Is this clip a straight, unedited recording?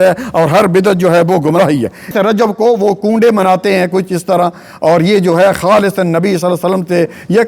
no; 1 cut; at 2.0 s

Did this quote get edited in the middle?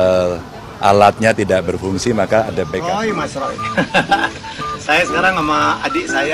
yes; 1 cut; at 2.9 s

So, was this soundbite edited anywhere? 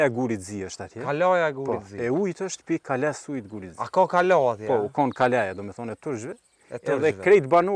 no; 0 cuts

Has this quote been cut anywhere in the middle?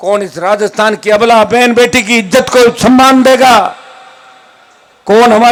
no; 0 cuts

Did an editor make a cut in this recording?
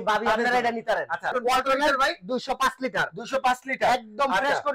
yes; 1 cut; at 1.4 s

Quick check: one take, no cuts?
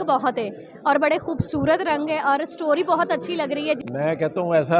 no; 1 cut; at 3.8 s

